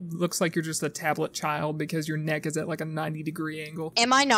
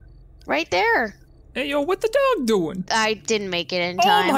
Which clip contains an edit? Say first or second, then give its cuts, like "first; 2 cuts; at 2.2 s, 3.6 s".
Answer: second; 1 cut; at 2.8 s